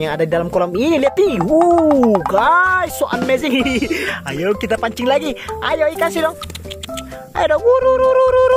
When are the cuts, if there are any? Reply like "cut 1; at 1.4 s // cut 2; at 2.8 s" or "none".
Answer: cut 1; at 3.9 s